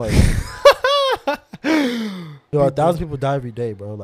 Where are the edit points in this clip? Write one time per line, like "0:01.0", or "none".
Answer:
0:02.5